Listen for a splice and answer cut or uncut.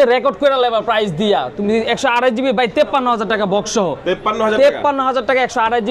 uncut